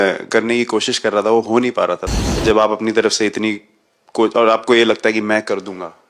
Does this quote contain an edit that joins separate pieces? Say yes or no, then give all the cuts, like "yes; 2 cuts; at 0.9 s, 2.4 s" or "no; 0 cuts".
yes; 1 cut; at 2.1 s